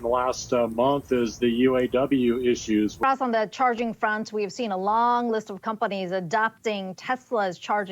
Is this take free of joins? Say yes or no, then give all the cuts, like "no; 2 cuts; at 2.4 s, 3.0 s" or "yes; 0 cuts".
no; 1 cut; at 3.0 s